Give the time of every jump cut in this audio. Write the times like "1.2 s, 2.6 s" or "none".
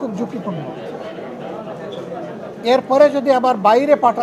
none